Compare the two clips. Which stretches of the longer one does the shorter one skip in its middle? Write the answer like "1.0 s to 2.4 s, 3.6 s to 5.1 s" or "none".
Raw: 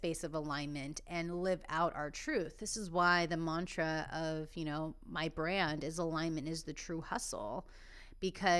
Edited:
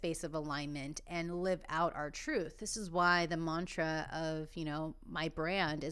none